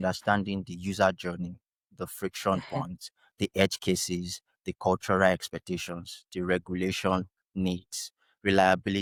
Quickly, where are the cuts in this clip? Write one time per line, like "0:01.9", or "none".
none